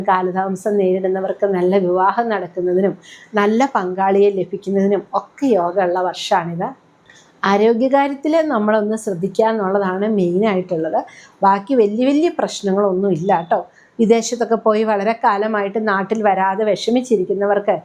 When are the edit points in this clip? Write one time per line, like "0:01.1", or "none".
none